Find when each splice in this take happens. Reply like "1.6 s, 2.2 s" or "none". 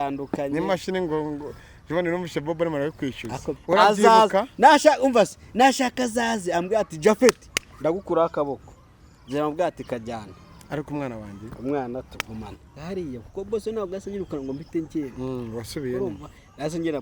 3.6 s, 12.7 s